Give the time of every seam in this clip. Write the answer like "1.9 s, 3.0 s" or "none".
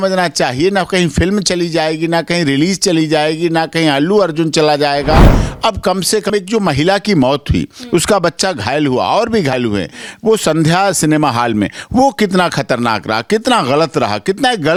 none